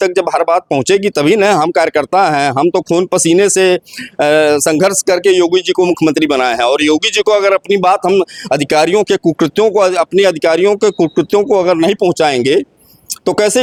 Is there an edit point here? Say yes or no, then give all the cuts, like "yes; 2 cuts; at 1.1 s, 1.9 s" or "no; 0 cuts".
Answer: no; 0 cuts